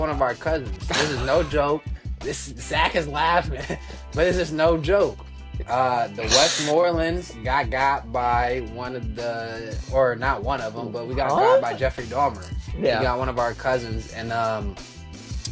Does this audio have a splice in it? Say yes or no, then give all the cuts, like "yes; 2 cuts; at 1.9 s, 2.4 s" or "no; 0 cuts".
no; 0 cuts